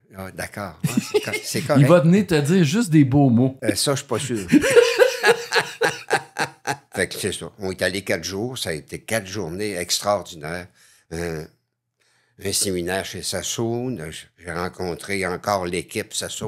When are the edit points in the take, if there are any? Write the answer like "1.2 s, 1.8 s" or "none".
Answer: 3.6 s, 6.8 s